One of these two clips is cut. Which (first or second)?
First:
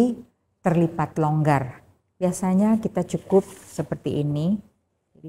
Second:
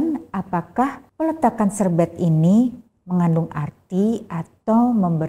second